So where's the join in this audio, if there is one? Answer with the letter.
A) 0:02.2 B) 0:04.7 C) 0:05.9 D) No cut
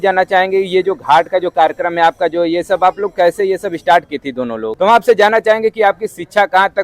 B